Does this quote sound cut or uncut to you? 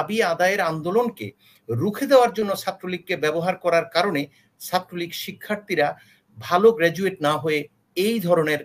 uncut